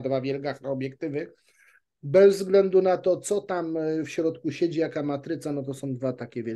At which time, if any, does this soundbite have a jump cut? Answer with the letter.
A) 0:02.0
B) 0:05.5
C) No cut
C